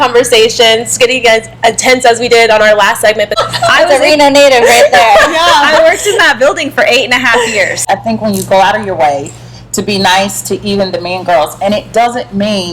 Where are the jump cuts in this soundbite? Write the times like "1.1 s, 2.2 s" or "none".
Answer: 3.3 s, 7.9 s